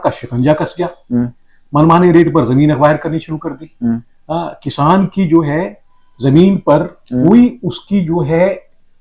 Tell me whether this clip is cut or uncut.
uncut